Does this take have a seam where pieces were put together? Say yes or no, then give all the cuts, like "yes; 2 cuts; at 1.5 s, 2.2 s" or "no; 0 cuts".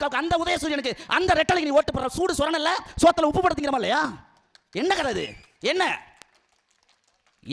no; 0 cuts